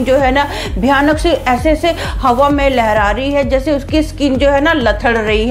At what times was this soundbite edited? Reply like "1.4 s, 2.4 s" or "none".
none